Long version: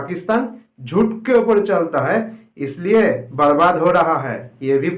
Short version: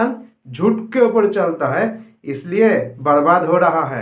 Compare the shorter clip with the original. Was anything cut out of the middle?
no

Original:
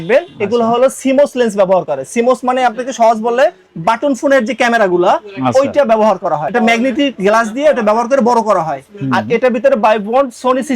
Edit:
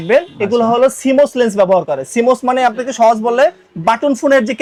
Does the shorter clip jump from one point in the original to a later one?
no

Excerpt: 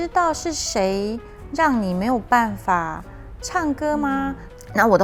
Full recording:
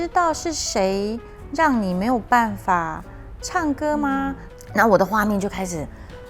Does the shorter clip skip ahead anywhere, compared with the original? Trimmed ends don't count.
no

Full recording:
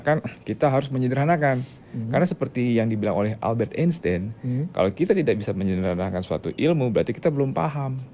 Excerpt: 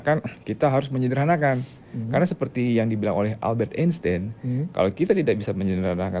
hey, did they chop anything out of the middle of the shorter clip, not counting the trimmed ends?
no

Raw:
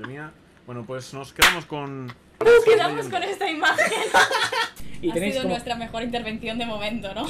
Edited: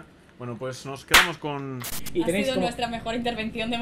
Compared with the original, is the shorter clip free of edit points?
no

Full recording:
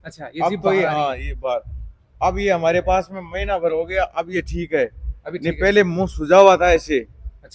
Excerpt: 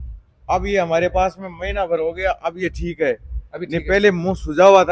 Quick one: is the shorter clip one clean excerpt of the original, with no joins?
yes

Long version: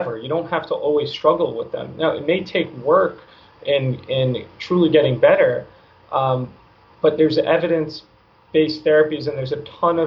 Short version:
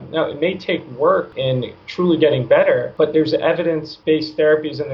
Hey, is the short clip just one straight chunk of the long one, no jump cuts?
no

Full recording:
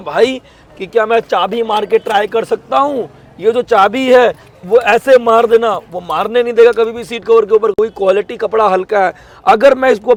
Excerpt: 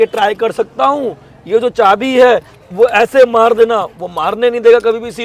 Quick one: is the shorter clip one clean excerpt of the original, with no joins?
yes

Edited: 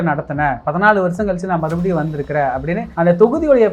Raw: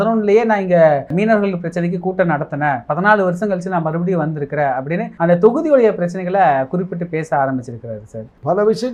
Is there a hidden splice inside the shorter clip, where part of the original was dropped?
no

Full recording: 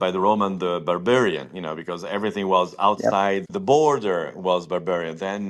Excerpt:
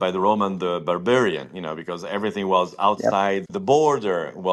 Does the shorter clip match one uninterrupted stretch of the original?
yes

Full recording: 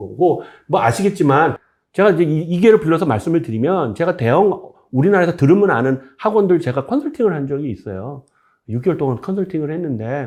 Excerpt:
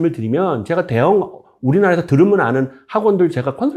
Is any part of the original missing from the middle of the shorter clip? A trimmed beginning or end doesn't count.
no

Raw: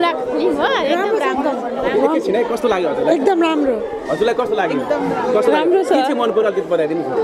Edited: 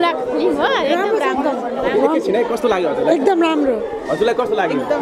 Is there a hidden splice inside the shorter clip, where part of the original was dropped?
no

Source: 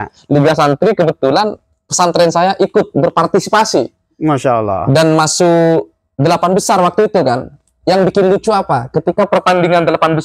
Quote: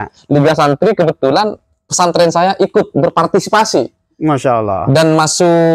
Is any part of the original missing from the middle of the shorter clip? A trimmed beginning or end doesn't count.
no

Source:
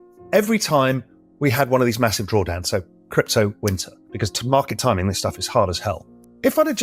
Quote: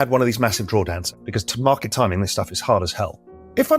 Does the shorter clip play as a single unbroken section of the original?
no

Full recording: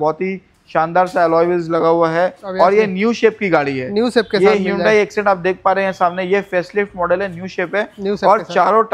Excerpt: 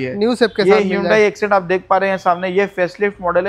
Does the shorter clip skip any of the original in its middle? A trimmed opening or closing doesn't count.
no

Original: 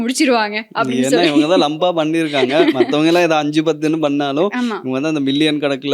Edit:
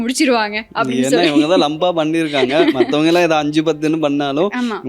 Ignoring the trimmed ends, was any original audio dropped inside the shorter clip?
no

